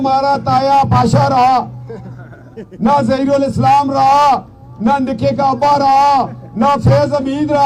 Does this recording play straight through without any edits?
yes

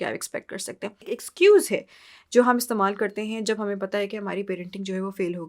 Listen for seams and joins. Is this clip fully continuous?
no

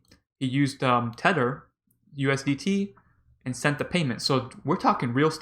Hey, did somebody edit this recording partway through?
no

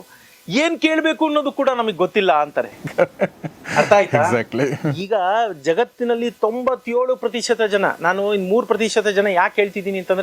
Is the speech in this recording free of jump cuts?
yes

